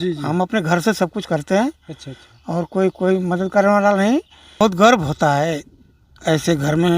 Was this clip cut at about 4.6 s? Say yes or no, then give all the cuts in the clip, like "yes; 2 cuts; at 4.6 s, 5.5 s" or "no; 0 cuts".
yes; 1 cut; at 4.6 s